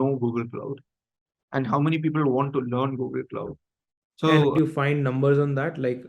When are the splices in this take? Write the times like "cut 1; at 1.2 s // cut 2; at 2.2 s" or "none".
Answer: cut 1; at 4.5 s